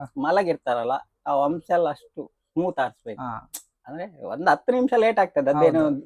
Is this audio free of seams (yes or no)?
yes